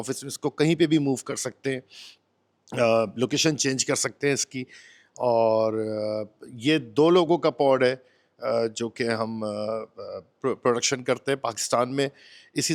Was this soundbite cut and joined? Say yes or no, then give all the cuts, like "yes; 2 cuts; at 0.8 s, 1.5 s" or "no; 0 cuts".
no; 0 cuts